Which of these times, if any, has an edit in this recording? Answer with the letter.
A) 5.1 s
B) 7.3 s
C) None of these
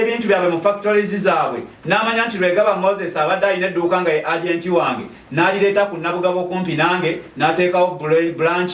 C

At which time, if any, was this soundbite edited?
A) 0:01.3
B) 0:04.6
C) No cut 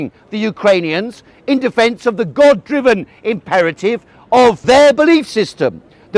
B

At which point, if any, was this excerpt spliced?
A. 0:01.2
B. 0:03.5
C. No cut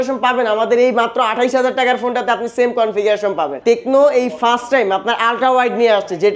B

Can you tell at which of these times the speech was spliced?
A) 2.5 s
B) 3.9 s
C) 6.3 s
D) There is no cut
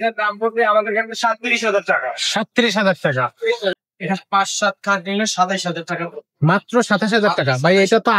B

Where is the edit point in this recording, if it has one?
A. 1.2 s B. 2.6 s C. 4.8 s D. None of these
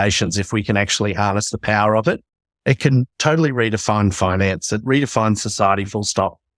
C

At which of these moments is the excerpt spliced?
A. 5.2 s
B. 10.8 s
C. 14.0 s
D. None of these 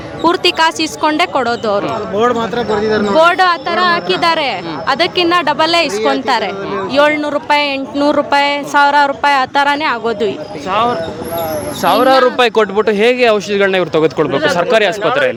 D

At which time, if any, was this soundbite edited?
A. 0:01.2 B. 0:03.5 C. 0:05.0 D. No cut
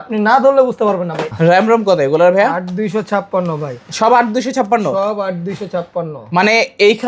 A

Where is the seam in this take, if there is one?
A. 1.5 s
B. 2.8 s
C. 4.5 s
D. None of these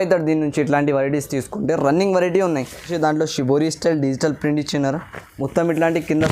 B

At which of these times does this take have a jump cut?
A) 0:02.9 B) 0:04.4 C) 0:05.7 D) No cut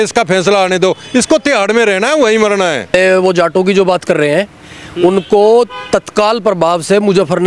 A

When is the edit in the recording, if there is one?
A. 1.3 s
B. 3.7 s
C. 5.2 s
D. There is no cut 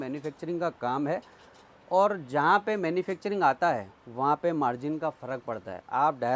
D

